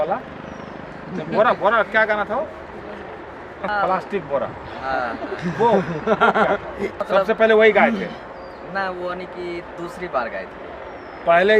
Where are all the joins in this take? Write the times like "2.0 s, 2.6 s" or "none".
3.7 s, 7.0 s